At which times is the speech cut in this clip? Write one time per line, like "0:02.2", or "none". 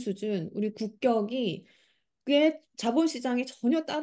none